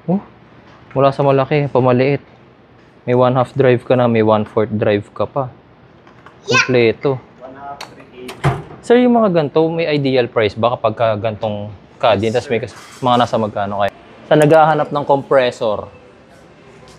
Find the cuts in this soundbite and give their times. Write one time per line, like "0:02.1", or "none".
0:13.9